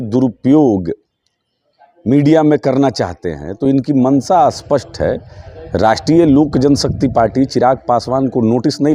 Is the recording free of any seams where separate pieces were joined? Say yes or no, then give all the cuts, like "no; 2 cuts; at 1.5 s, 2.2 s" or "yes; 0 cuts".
yes; 0 cuts